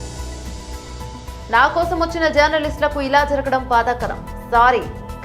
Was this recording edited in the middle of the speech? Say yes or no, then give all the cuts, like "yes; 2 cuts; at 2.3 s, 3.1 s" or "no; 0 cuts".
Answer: yes; 1 cut; at 1.2 s